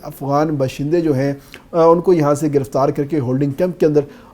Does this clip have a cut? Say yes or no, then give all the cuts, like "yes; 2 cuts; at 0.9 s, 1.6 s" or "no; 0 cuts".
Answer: no; 0 cuts